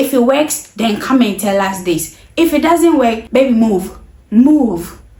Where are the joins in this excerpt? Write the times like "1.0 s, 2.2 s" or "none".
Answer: none

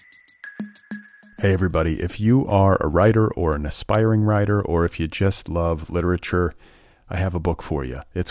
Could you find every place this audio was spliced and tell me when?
0.9 s

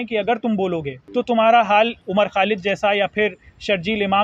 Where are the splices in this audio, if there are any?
1.0 s, 2.0 s

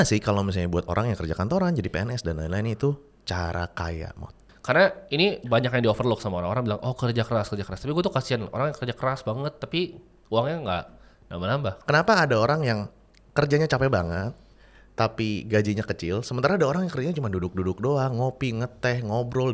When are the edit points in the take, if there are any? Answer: 4.5 s, 11.8 s

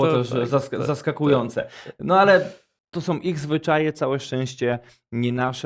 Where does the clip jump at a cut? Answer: none

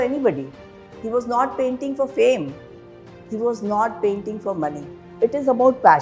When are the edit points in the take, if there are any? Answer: 5.0 s

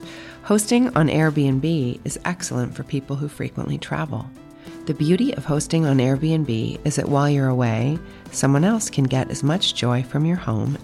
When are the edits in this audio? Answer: none

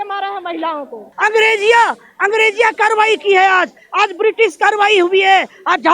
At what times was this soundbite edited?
1.1 s

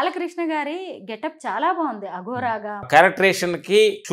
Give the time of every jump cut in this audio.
2.9 s

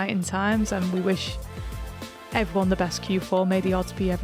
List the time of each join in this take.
none

